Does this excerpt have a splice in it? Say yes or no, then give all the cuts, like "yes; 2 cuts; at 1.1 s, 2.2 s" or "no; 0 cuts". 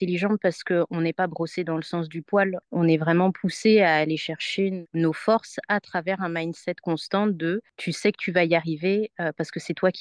no; 0 cuts